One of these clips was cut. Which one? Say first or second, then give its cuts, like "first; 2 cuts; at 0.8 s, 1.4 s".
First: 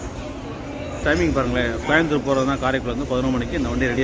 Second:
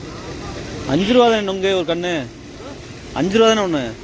first; 1 cut; at 1.0 s